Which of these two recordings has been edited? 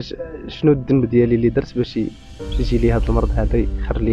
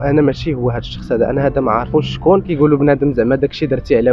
second; 1 cut; at 2.5 s

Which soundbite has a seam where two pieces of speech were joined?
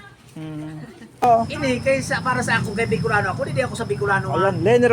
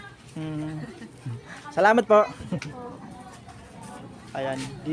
first; 1 cut; at 1.2 s

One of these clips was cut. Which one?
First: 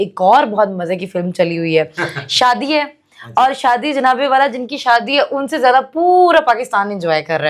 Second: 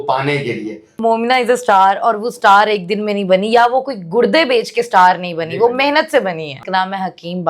second; 2 cuts; at 0.9 s, 6.6 s

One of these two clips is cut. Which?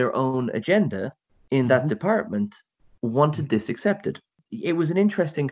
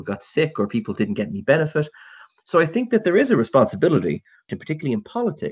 second; 1 cut; at 4.5 s

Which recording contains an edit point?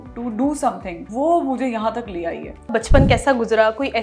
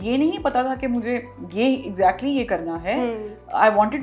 first; 2 cuts; at 0.9 s, 2.7 s

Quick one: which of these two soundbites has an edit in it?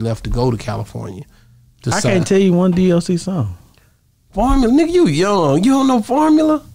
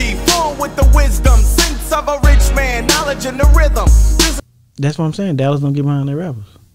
second; 1 cut; at 4.4 s

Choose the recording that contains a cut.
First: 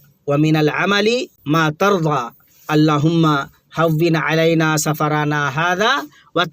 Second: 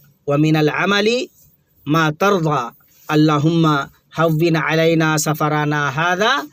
first; 1 cut; at 1.3 s

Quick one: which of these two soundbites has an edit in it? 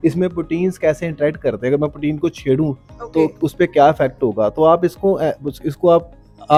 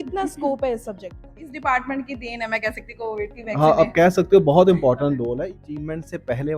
second; 2 cuts; at 1.5 s, 5.4 s

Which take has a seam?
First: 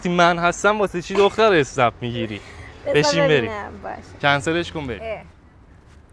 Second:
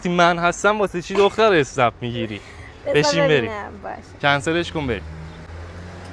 first; 1 cut; at 5.0 s

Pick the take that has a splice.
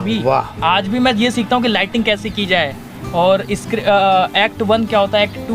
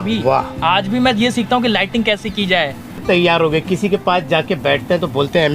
second; 1 cut; at 3.0 s

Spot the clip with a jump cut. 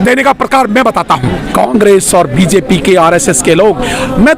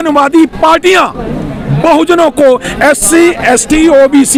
first; 1 cut; at 1.4 s

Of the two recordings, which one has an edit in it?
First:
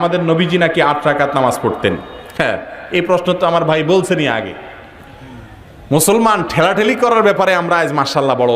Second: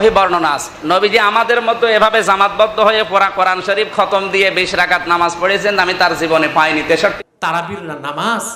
second; 1 cut; at 7.1 s

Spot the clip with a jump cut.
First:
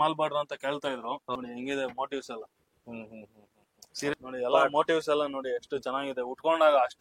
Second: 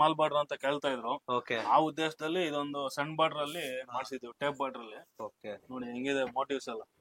first; 2 cuts; at 1.3 s, 4.1 s

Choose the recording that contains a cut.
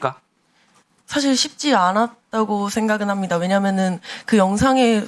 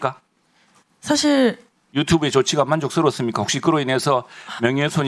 first; 1 cut; at 0.9 s

